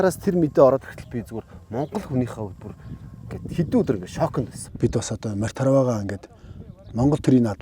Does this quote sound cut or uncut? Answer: cut